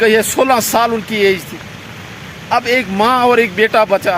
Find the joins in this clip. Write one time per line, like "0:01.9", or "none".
none